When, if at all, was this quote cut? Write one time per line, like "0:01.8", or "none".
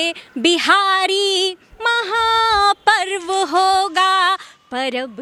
none